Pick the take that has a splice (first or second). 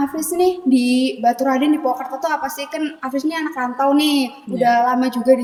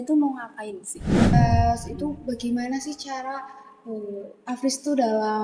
second